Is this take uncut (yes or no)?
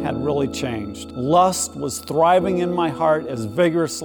no